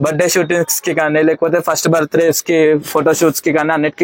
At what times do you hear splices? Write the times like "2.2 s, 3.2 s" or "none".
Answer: none